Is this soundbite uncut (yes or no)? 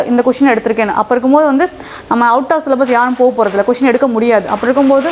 yes